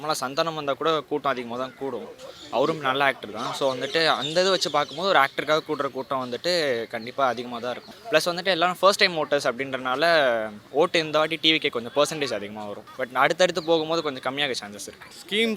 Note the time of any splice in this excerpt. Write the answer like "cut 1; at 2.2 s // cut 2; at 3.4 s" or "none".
none